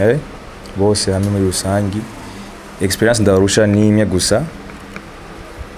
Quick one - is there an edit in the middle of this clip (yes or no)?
no